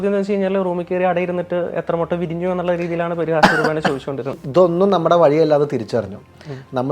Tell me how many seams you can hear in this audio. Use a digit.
1